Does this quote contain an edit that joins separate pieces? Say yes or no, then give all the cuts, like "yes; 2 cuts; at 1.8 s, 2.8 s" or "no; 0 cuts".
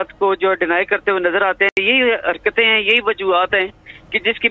no; 0 cuts